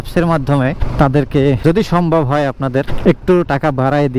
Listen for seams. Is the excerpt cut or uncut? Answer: uncut